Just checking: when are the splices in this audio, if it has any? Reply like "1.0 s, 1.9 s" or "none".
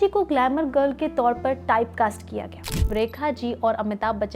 2.9 s